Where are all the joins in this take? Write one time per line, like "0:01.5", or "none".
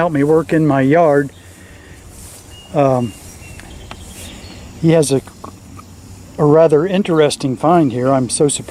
none